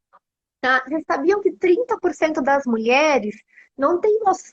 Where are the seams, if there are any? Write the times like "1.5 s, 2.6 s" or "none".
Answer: none